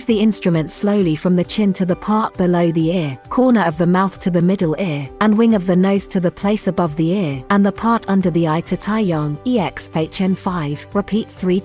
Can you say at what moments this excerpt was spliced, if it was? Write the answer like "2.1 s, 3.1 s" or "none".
3.2 s, 5.0 s, 7.4 s, 9.3 s, 10.8 s